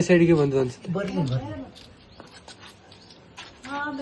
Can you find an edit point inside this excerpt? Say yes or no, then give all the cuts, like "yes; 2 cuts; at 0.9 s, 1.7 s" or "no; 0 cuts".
yes; 1 cut; at 2.0 s